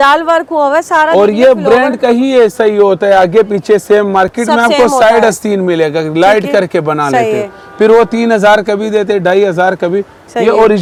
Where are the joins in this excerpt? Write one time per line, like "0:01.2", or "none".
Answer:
none